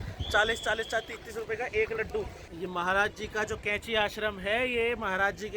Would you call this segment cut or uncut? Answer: cut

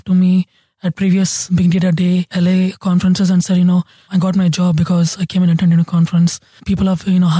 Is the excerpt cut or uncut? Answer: cut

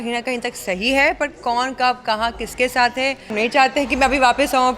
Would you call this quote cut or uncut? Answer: cut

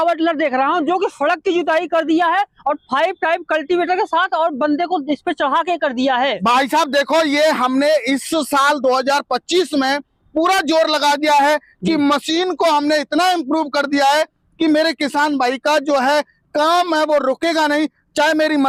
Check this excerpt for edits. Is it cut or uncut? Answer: uncut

